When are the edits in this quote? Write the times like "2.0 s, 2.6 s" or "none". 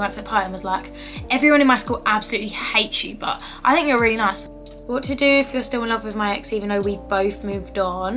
4.4 s